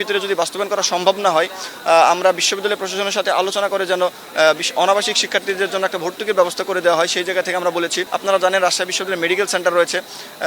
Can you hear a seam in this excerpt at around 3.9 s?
no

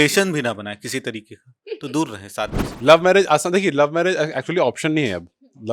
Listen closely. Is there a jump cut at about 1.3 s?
no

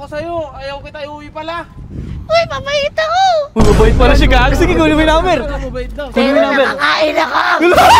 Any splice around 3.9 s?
no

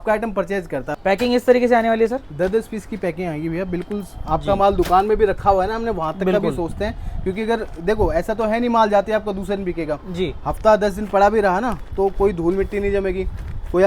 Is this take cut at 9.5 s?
no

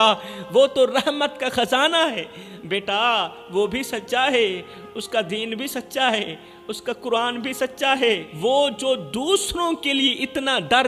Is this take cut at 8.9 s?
no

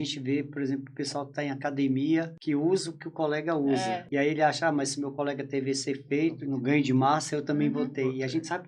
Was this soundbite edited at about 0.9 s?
no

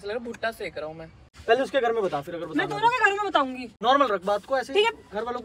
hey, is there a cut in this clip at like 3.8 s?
yes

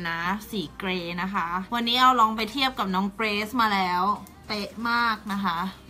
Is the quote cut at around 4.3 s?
no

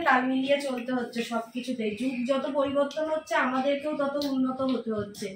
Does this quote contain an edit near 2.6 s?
no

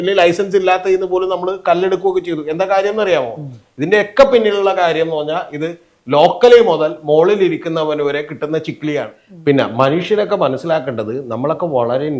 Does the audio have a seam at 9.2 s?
yes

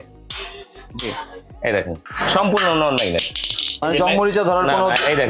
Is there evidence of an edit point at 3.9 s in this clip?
no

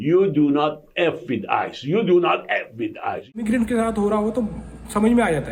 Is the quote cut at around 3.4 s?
yes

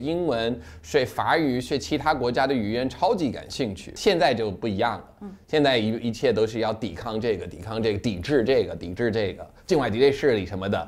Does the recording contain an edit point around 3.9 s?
yes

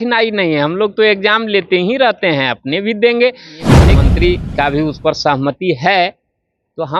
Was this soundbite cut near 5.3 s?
no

